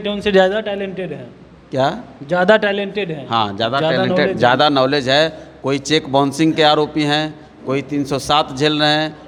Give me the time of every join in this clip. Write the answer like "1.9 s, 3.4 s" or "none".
none